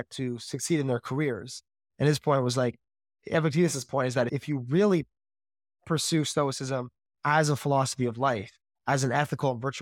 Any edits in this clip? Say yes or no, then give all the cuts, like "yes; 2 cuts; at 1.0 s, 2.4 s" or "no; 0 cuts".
no; 0 cuts